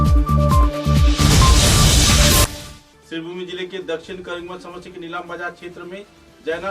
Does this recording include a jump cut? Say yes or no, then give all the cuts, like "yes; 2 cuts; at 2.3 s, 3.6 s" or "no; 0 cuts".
yes; 1 cut; at 2.4 s